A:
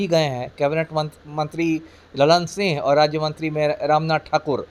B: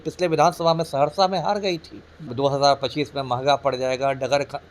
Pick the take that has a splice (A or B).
B